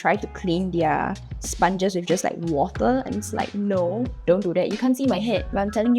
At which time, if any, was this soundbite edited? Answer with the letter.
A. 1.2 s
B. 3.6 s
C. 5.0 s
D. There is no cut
D